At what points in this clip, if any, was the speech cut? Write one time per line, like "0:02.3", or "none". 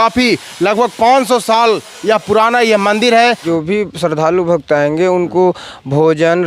0:03.4